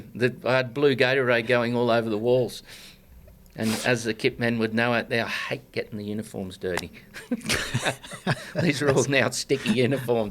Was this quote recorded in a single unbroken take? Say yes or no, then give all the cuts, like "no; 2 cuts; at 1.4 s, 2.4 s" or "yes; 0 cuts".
yes; 0 cuts